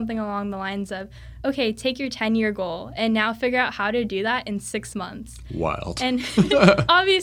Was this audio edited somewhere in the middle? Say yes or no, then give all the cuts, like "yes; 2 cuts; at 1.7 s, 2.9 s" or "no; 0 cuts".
no; 0 cuts